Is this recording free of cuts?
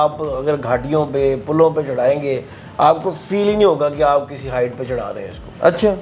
yes; 0 cuts

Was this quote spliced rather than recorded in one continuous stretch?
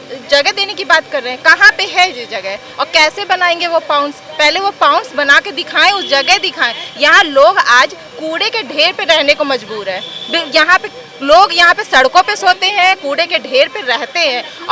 no; 0 cuts

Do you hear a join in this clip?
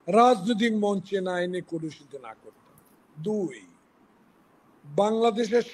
no; 0 cuts

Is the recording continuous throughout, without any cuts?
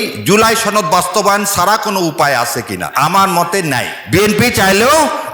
no; 2 cuts; at 2.9 s, 3.9 s

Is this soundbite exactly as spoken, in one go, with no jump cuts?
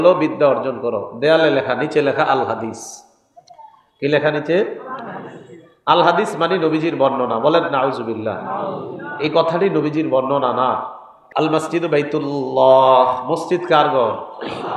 no; 1 cut; at 11.2 s

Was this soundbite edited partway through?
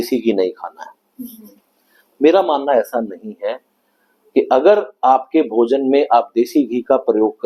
no; 0 cuts

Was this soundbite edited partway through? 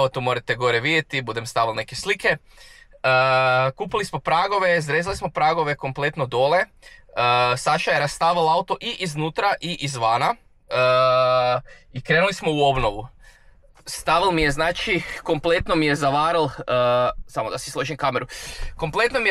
no; 0 cuts

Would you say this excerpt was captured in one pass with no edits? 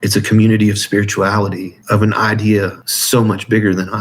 no; 2 cuts; at 1.7 s, 2.9 s

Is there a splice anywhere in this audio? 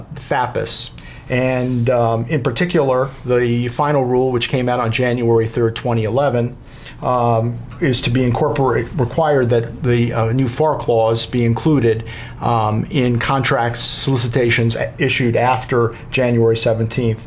yes; 1 cut; at 1.5 s

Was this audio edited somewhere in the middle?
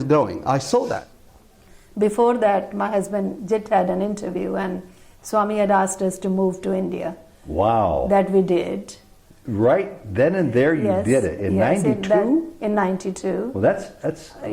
yes; 1 cut; at 1.0 s

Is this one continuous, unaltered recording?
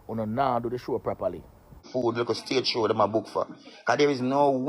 no; 1 cut; at 1.9 s

